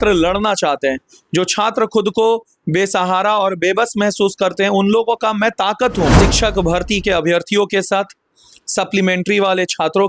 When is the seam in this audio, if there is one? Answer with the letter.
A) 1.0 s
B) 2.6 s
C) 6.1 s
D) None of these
C